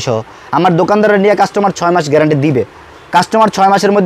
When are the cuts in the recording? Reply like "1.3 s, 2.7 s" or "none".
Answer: none